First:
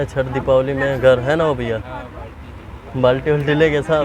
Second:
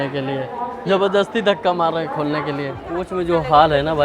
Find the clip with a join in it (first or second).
second